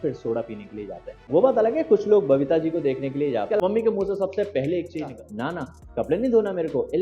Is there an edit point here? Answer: yes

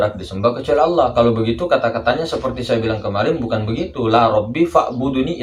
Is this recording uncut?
yes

